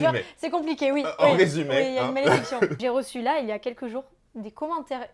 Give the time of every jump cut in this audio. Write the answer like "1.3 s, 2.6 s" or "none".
2.8 s